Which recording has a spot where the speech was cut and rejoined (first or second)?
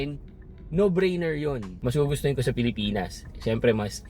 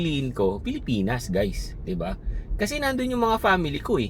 first